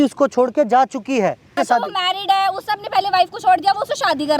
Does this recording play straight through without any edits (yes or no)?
no